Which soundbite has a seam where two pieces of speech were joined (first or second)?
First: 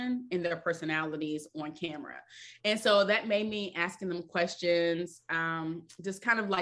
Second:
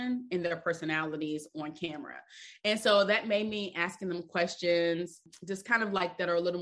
second